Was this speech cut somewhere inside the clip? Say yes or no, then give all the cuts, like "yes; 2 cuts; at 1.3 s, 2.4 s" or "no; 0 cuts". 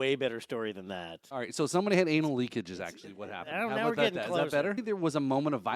yes; 2 cuts; at 1.2 s, 4.8 s